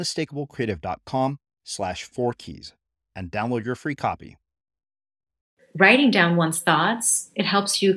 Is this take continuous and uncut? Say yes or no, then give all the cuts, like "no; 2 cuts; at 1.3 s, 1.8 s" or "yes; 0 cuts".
no; 1 cut; at 5.6 s